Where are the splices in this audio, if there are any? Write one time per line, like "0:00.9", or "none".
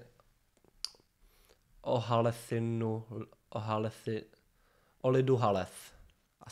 none